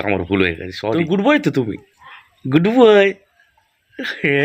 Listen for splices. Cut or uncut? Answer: cut